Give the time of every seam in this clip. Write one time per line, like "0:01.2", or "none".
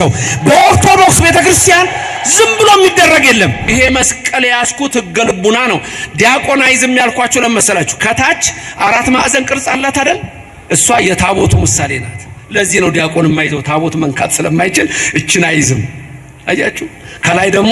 0:03.7